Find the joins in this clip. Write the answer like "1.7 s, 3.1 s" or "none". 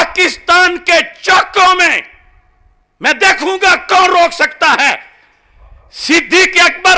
none